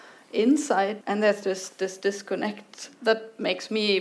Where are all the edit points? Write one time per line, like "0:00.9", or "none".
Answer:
0:01.0
0:02.9